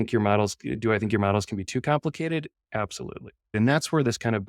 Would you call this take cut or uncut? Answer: cut